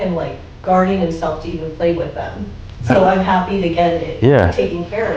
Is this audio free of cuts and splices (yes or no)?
yes